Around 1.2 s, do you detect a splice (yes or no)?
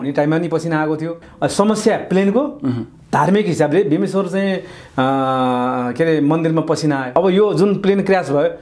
yes